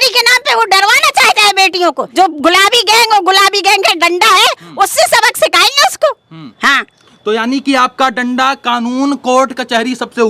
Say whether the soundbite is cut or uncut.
cut